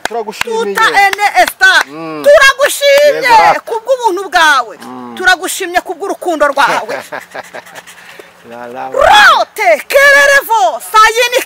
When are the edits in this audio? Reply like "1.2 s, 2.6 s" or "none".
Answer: none